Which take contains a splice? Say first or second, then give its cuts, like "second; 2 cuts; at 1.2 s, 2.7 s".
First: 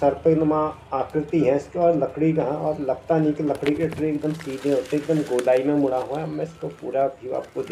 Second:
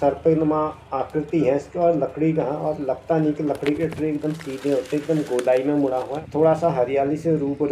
second; 1 cut; at 6.2 s